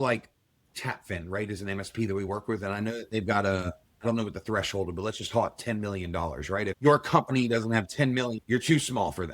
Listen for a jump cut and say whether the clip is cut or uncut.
cut